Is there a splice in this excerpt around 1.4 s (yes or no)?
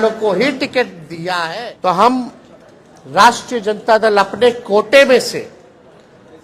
yes